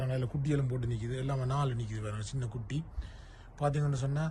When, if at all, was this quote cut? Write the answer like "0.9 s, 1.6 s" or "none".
none